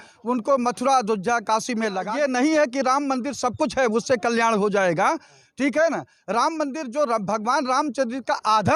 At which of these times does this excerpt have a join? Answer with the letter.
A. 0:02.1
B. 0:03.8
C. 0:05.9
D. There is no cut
A